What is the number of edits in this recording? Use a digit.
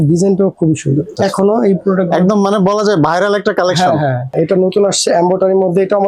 2